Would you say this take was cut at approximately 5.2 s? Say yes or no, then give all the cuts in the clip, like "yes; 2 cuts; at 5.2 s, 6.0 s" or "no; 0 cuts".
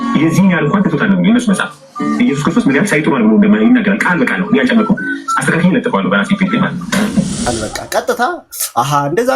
no; 1 cut; at 7.5 s